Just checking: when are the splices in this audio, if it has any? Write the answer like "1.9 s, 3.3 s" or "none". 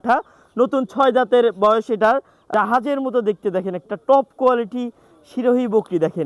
2.4 s